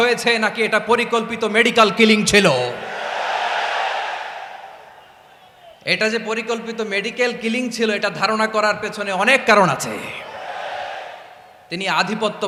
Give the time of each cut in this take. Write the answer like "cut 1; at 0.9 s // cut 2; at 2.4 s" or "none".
none